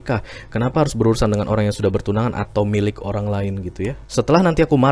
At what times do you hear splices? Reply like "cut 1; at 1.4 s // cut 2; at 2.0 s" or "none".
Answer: cut 1; at 4.0 s

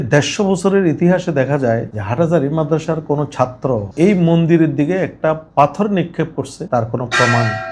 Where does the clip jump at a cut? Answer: none

